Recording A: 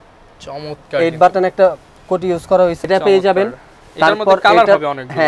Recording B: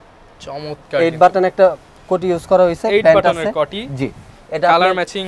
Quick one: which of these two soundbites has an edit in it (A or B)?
A